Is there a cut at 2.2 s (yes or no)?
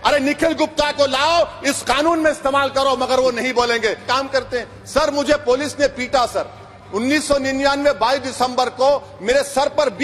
no